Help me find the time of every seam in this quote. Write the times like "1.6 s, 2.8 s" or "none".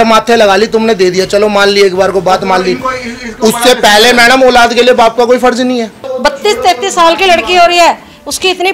6.0 s